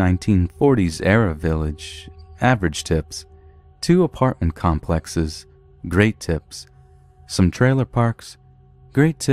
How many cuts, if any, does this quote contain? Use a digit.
1